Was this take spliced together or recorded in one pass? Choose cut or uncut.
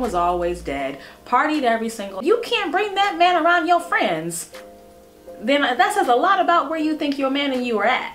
cut